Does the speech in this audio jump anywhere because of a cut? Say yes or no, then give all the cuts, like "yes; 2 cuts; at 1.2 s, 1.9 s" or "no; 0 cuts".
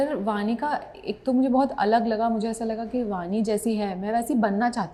no; 0 cuts